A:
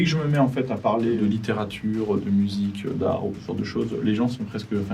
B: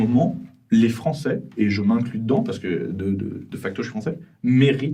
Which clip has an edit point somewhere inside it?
A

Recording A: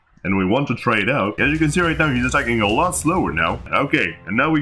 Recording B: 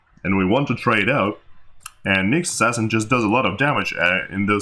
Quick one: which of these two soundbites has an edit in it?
A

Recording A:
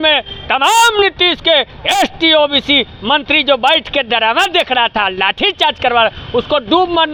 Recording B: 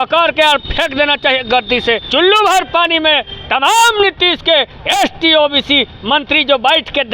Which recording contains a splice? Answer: B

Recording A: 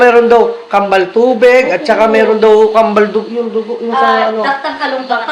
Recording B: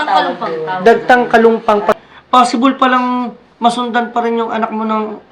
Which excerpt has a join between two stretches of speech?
B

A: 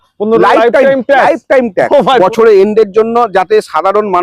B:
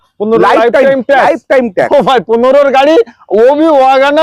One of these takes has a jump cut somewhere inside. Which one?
A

